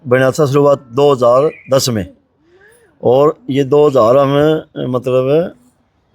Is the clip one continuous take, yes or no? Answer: yes